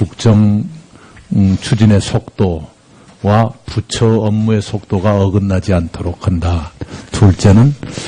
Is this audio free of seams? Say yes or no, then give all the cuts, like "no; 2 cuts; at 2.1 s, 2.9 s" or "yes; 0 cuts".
no; 1 cut; at 3.4 s